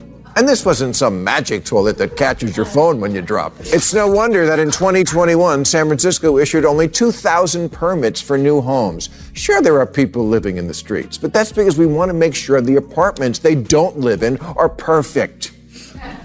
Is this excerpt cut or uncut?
cut